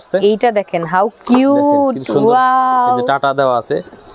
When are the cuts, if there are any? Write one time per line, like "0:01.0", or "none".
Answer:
none